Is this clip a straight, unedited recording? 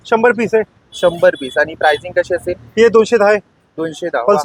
yes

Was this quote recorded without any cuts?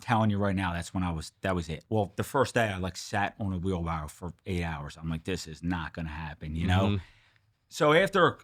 no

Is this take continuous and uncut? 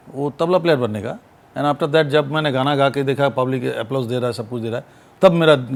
yes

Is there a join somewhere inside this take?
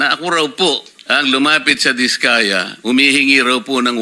yes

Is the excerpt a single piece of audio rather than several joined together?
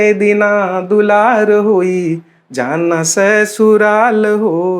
yes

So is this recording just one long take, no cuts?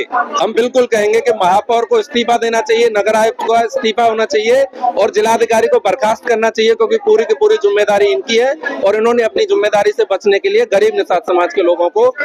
yes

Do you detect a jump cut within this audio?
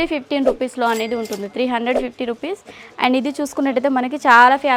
no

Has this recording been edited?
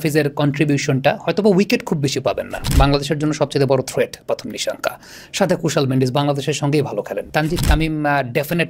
yes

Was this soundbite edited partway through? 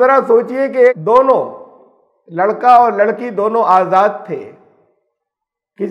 yes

